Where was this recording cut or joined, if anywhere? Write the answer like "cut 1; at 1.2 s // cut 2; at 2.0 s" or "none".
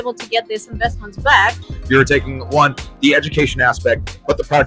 cut 1; at 1.6 s